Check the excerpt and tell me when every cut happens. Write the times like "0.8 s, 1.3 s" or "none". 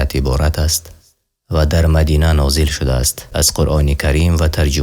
3.3 s